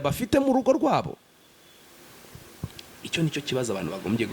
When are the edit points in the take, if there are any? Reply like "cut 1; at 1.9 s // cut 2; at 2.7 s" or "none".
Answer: none